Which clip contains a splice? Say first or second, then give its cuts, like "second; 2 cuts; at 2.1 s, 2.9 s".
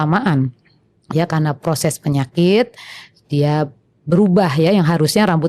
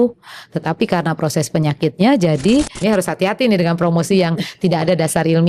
second; 1 cut; at 2.7 s